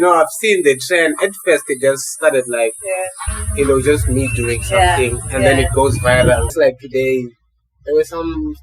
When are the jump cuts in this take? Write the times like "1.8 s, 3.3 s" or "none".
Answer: 6.5 s